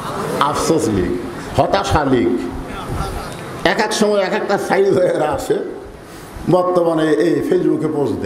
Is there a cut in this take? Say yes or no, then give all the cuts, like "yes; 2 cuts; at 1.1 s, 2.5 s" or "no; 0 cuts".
no; 0 cuts